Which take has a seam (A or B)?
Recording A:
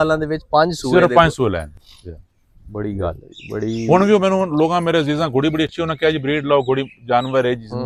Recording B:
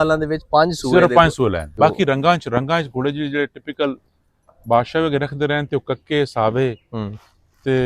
B